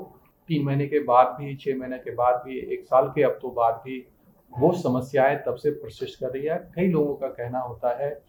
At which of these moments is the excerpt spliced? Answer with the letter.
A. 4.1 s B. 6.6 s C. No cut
C